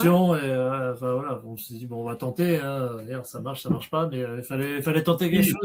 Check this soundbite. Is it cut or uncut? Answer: uncut